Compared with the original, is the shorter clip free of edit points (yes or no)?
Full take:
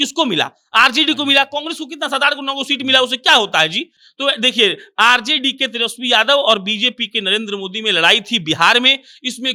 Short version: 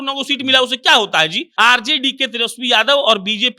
no